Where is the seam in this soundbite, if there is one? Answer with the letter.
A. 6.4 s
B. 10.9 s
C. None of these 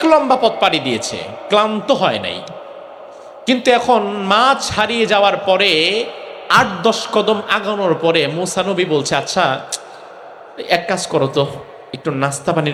C